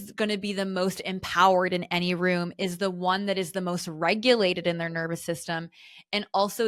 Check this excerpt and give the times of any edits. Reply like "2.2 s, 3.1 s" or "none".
none

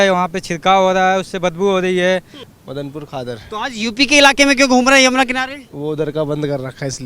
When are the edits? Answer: 2.4 s

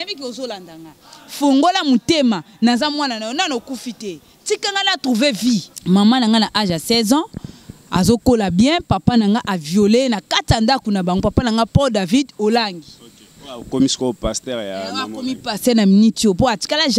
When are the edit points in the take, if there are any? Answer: 5.7 s

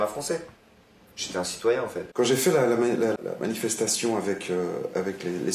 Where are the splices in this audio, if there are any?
2.0 s, 3.2 s

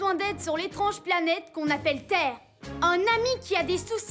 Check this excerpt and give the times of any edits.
none

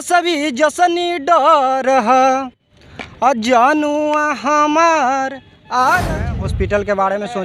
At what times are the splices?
6.3 s

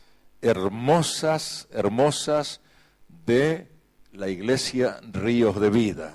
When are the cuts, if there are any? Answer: 2.1 s

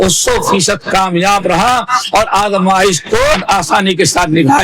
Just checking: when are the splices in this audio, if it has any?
3.4 s

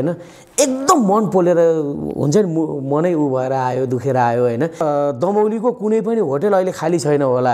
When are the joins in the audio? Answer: 4.8 s

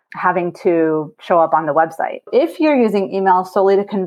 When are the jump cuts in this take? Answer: 2.3 s

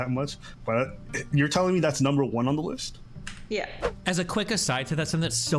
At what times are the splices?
3.9 s

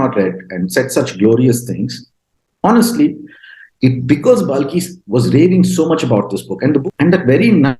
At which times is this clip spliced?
6.9 s

